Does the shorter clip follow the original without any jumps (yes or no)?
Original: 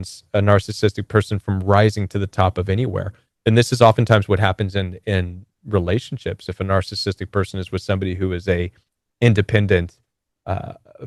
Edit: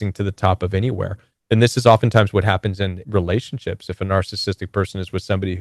no